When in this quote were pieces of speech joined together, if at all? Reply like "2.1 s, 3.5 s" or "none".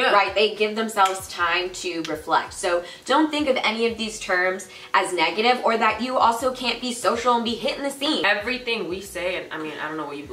8.2 s